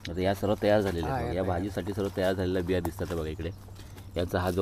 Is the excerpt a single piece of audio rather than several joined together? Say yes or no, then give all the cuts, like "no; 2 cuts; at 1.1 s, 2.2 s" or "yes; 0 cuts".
yes; 0 cuts